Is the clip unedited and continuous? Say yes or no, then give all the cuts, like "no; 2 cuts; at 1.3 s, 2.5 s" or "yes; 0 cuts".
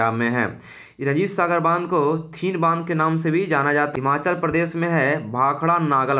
no; 1 cut; at 3.9 s